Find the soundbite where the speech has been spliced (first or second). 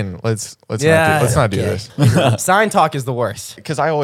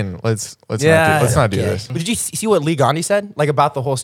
second